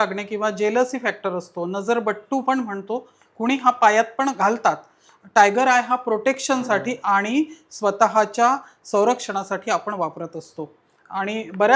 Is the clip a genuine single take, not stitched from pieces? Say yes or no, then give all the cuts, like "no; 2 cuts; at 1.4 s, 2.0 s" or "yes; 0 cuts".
yes; 0 cuts